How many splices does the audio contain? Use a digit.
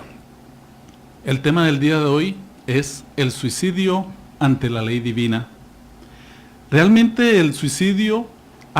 1